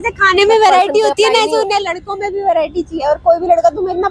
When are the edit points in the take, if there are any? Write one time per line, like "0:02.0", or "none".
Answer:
none